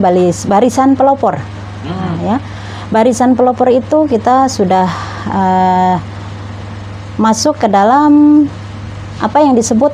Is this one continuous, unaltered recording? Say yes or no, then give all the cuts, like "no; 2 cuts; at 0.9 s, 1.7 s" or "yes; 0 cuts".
yes; 0 cuts